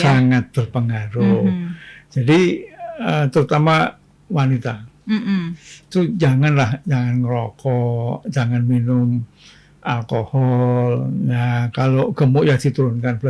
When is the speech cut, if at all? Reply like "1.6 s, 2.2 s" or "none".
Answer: none